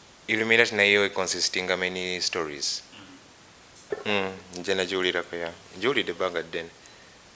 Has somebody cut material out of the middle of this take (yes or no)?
yes